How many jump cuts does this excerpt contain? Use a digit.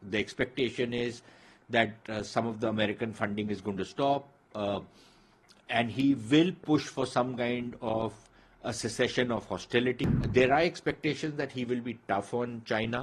1